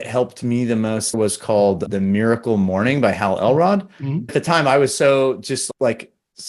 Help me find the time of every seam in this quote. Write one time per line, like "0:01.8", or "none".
0:01.2
0:04.3